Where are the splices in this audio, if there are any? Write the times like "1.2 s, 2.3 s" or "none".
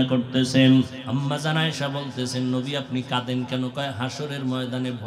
1.0 s